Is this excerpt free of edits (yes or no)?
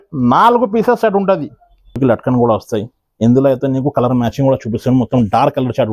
no